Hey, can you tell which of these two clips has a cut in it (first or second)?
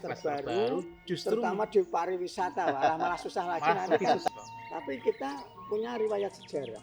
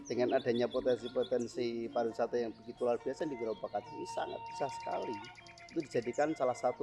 first